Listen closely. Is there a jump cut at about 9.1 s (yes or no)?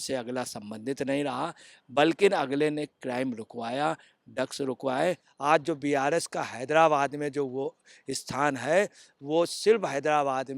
no